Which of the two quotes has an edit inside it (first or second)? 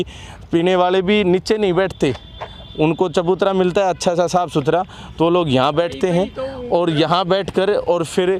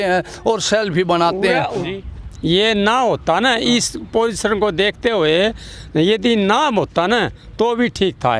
second